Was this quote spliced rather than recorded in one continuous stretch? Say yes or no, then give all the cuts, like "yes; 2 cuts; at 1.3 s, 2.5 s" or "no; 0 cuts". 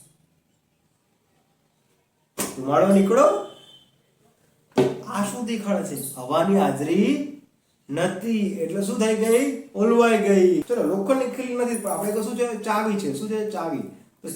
yes; 1 cut; at 10.6 s